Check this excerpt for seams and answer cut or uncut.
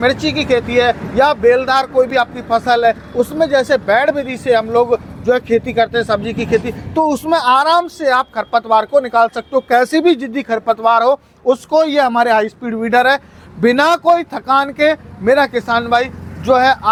uncut